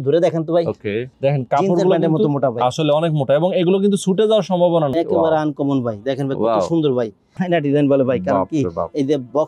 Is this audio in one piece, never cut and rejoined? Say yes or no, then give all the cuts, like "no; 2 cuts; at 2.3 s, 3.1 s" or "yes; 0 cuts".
no; 3 cuts; at 1.1 s, 4.9 s, 7.2 s